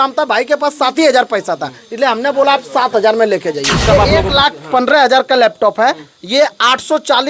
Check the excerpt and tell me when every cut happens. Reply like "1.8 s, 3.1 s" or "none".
3.8 s